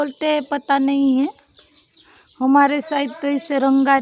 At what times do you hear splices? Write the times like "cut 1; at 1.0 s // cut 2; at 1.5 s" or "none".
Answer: none